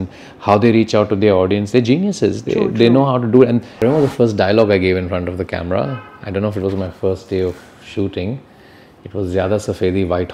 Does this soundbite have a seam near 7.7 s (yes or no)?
no